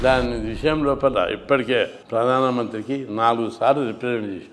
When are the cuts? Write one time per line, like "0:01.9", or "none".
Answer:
0:02.0